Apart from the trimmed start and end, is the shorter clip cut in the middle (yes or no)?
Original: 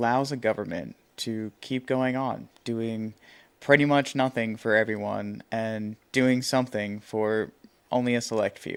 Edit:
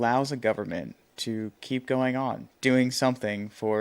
yes